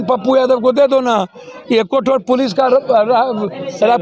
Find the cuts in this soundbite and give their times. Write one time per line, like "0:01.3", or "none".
none